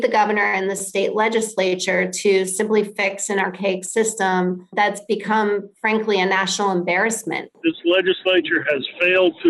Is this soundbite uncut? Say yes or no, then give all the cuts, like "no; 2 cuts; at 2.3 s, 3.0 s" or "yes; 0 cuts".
no; 2 cuts; at 4.7 s, 7.6 s